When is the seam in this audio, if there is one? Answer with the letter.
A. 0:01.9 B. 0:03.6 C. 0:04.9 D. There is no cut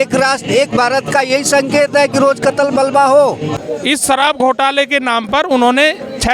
B